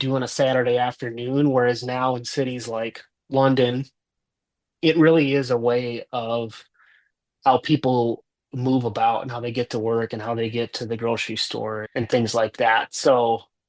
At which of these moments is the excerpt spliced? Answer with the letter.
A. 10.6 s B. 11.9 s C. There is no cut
B